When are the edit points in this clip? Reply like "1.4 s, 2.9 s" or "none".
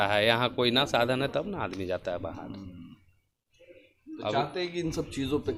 none